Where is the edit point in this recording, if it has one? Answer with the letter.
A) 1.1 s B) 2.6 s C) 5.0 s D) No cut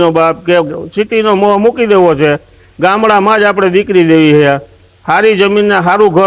D